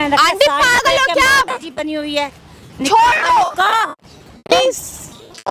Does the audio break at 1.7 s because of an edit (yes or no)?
no